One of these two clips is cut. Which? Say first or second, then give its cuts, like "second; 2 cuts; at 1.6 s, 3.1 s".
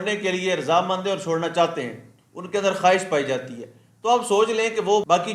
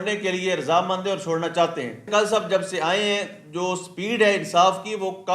second; 1 cut; at 2.1 s